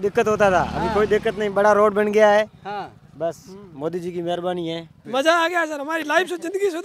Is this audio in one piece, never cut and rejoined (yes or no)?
no